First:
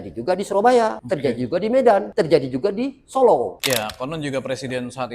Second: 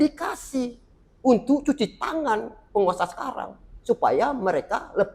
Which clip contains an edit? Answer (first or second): first